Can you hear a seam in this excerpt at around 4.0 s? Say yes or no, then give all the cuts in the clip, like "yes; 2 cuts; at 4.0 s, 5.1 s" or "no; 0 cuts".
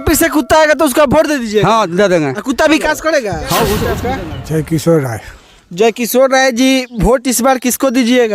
yes; 1 cut; at 4.0 s